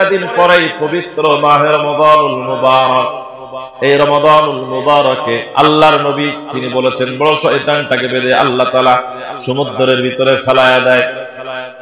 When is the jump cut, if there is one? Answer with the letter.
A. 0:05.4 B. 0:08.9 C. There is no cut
A